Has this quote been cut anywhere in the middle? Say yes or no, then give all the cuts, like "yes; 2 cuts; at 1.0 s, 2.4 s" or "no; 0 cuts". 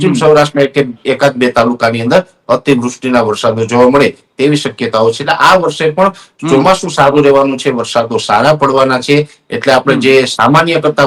no; 0 cuts